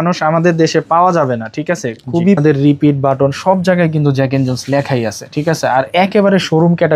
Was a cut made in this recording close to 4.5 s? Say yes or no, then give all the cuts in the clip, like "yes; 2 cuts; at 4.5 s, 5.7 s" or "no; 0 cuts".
no; 1 cut; at 2.4 s